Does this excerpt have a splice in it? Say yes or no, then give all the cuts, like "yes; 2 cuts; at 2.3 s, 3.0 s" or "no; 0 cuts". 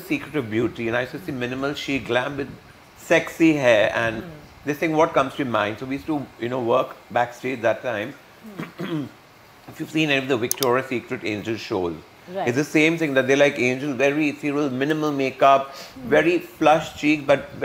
no; 0 cuts